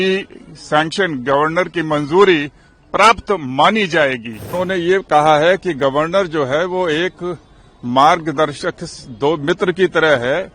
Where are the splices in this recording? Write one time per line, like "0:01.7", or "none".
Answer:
0:04.5